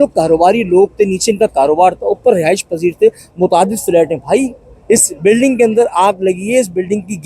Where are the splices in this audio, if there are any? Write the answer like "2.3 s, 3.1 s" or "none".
3.3 s